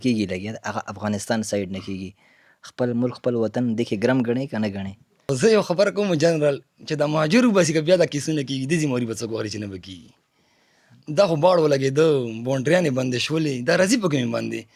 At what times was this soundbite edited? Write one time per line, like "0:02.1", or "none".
none